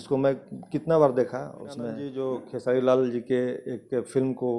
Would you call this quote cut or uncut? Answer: cut